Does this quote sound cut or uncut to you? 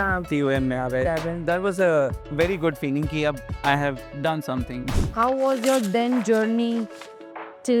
cut